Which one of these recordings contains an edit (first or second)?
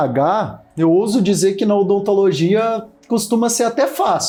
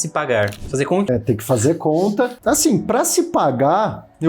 second